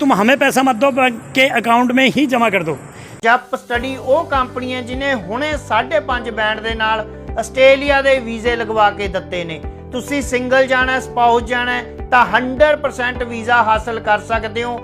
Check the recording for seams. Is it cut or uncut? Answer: cut